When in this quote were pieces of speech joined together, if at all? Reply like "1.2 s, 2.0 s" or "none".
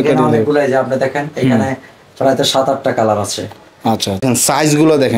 4.2 s